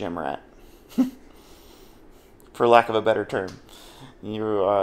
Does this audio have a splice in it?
no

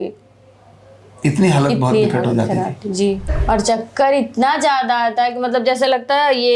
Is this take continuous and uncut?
no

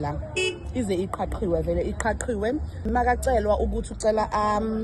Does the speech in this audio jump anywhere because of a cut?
yes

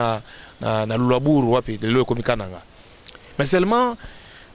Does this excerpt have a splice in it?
no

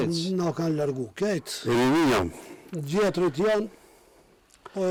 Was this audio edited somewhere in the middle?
no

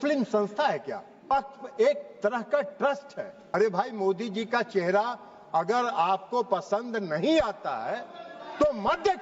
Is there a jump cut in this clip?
yes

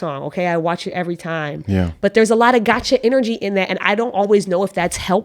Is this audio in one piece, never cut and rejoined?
yes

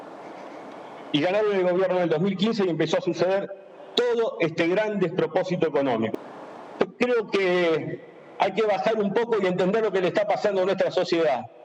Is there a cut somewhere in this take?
yes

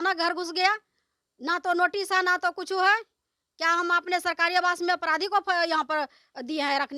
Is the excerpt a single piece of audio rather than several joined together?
yes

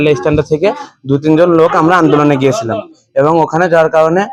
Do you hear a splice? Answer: no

